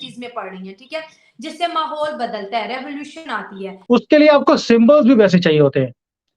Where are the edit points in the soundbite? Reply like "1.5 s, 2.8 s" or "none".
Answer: 3.7 s